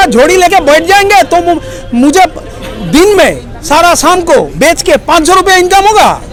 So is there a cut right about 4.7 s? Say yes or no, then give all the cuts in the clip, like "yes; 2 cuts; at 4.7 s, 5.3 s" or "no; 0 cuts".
no; 0 cuts